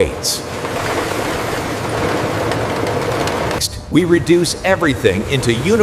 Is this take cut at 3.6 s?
yes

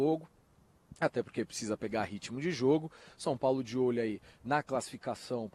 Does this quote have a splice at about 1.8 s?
yes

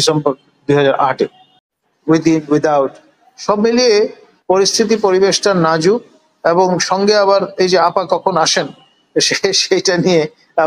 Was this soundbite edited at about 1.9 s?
yes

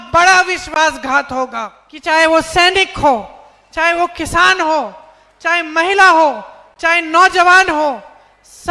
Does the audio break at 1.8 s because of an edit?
yes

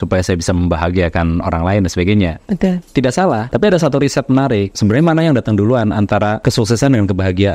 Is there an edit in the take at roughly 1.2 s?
no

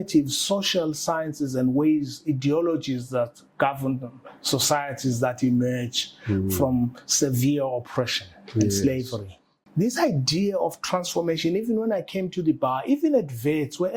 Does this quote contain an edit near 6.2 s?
no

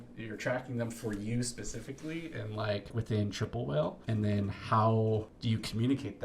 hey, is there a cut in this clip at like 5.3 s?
yes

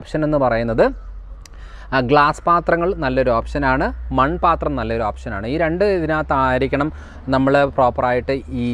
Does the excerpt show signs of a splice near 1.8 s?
no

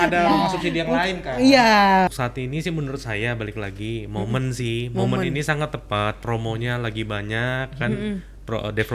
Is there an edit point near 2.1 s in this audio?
yes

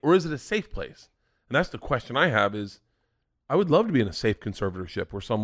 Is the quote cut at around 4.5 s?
no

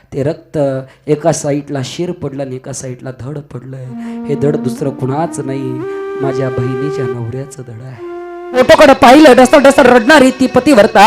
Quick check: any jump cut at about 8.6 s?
yes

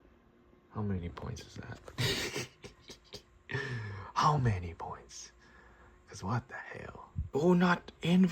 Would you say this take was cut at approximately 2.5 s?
no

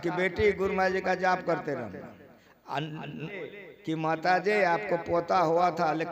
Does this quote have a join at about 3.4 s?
yes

